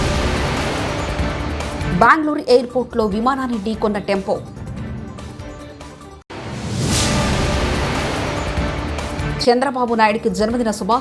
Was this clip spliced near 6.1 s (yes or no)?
no